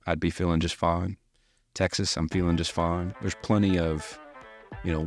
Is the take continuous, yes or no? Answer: yes